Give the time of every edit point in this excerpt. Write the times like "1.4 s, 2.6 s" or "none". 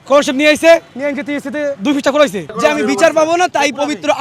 2.5 s